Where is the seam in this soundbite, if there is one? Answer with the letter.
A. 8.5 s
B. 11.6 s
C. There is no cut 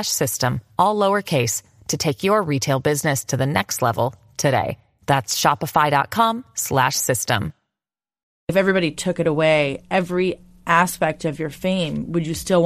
A